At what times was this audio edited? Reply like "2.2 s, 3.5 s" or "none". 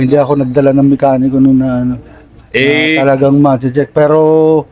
none